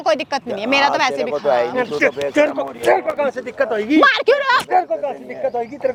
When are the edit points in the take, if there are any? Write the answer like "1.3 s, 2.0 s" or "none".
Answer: none